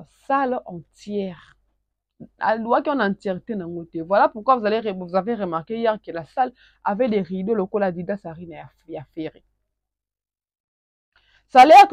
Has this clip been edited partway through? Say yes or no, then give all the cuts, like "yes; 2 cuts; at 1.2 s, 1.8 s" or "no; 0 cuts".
no; 0 cuts